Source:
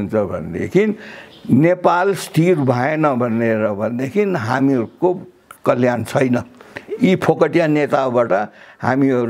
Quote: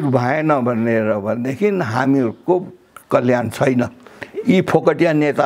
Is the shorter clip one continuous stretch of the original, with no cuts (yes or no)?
yes